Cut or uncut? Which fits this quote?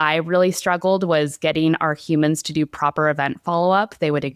uncut